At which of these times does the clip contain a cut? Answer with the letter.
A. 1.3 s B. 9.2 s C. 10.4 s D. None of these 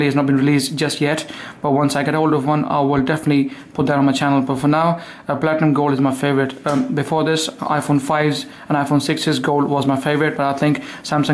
D